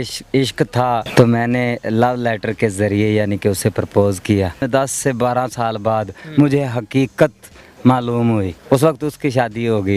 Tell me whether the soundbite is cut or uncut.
cut